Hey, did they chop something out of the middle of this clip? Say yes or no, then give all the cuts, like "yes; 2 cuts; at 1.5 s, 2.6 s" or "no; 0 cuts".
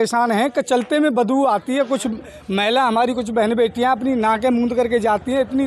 no; 0 cuts